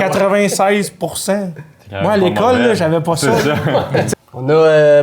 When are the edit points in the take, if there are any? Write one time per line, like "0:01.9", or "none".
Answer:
0:04.1

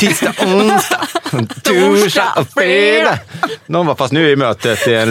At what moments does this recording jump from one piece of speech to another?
none

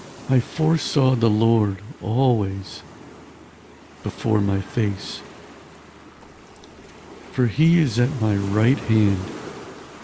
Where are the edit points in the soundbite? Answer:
none

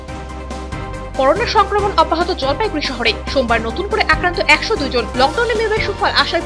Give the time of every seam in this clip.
0:01.0

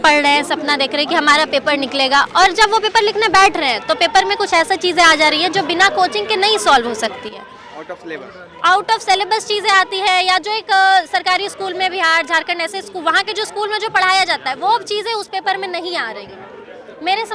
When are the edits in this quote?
none

